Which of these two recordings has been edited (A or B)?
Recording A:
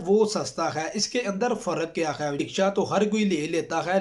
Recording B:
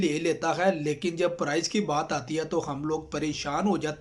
A